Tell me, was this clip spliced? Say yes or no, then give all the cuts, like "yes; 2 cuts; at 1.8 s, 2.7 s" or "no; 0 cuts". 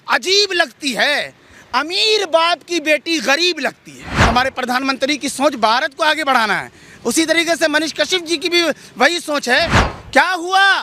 yes; 2 cuts; at 4.1 s, 9.8 s